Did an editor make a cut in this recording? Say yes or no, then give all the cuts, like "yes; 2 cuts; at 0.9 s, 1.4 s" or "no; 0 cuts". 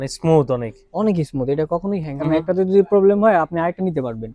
yes; 1 cut; at 2.1 s